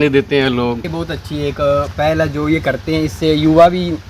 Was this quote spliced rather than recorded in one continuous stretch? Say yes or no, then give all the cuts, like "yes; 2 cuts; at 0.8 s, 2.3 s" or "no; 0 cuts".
yes; 1 cut; at 1.0 s